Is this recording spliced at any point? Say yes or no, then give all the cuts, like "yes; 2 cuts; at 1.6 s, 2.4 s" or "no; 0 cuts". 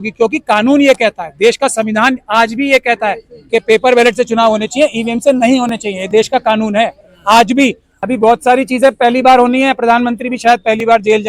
yes; 1 cut; at 7.9 s